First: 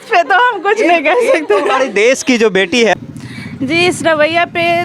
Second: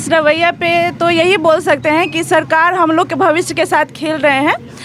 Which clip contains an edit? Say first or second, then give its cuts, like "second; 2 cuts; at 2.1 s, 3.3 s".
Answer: first; 1 cut; at 3.0 s